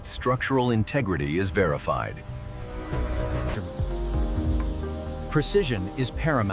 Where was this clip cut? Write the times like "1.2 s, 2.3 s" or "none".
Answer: 3.5 s